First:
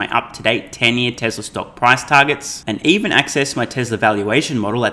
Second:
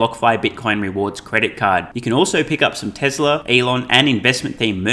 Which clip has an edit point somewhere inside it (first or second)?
second